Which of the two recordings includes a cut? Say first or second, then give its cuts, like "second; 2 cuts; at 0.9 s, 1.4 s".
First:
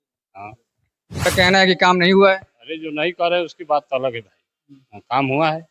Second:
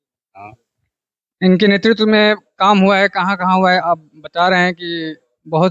first; 1 cut; at 1.3 s